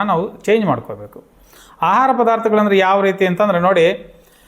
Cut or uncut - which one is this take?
uncut